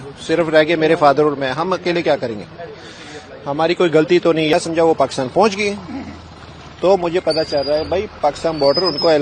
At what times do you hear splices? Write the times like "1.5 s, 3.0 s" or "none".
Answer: 4.5 s